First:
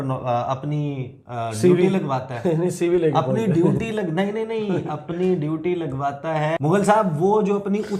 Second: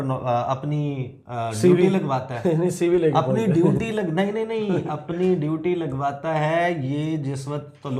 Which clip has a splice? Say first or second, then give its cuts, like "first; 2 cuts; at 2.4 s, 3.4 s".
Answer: first; 1 cut; at 6.6 s